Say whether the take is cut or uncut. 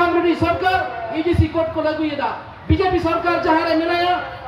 uncut